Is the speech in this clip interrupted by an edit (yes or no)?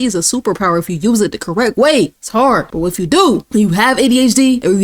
no